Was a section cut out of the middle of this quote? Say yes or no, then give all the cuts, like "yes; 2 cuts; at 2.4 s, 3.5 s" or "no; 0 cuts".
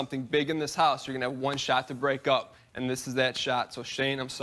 no; 0 cuts